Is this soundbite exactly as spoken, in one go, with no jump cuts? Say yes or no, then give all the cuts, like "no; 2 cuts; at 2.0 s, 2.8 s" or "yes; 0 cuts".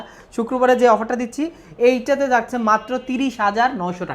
yes; 0 cuts